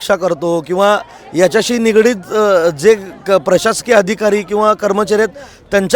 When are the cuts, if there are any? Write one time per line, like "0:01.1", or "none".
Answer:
none